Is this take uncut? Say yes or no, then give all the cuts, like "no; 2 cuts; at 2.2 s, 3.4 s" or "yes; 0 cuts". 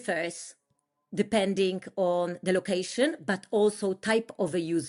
yes; 0 cuts